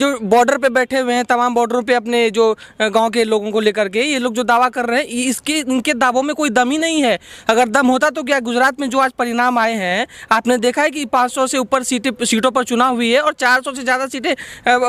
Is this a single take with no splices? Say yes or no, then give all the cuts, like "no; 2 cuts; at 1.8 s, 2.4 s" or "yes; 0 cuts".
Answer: yes; 0 cuts